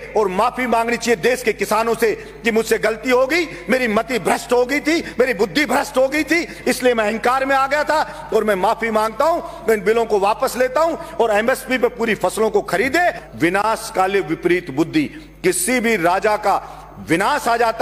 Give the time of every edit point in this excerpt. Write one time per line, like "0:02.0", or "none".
0:13.2